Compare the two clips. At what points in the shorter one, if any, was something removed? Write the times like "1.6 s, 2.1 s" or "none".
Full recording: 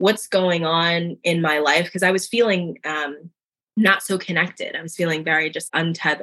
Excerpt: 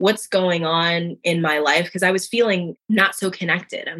2.8 s